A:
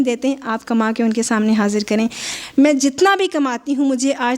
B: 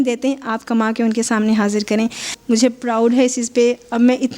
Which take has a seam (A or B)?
B